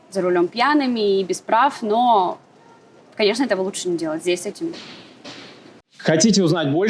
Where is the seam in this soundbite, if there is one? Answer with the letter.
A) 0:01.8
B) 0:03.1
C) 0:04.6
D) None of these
D